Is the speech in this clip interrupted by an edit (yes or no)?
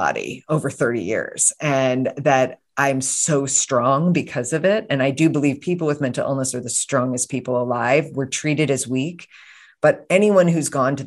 no